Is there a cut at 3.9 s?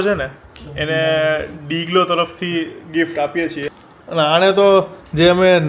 yes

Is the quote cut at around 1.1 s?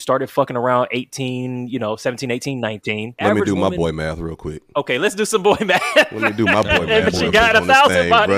no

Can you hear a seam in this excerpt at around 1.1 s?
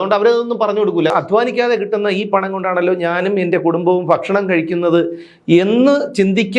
yes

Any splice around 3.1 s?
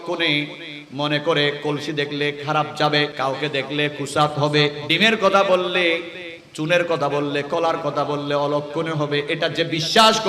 yes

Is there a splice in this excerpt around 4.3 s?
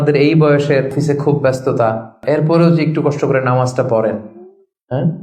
no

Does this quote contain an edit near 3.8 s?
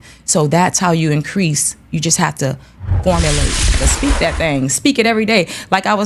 yes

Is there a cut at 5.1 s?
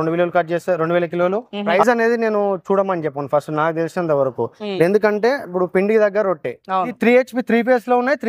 no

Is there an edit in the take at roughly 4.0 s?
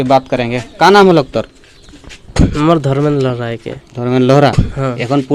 no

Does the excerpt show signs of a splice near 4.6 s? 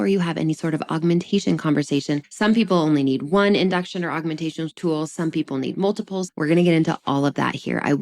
no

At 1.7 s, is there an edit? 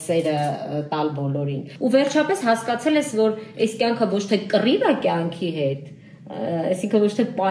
yes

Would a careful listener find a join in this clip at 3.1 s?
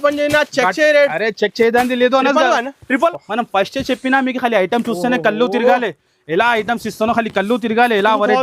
yes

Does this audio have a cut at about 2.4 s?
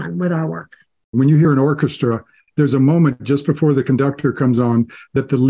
yes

